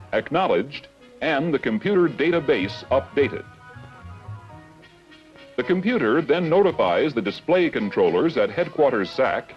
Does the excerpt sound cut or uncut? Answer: cut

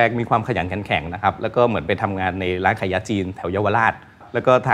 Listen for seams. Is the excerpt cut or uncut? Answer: uncut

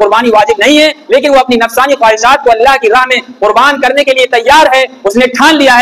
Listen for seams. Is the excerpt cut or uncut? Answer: uncut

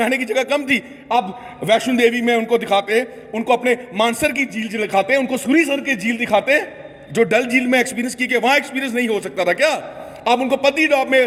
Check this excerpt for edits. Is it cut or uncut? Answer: uncut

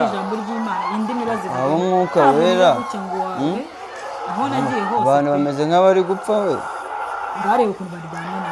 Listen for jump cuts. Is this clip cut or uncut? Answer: uncut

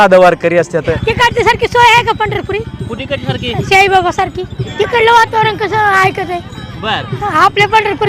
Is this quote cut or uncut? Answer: cut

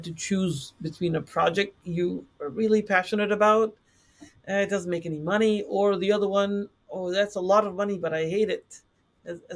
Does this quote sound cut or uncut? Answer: uncut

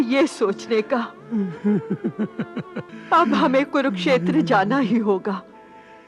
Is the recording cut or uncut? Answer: cut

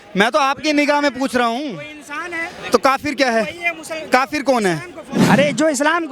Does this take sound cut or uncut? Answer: cut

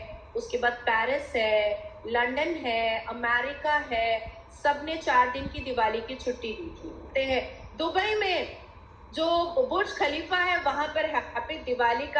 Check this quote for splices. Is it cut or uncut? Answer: cut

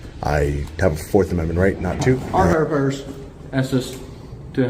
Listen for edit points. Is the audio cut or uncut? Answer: cut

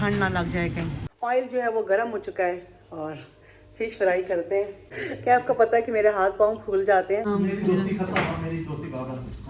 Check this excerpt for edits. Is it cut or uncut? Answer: cut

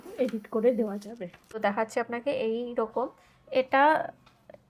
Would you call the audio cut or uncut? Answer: cut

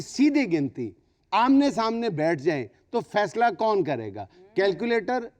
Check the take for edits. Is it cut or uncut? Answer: uncut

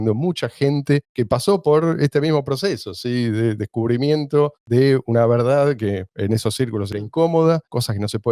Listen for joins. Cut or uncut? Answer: uncut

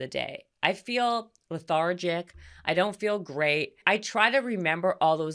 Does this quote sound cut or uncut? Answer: cut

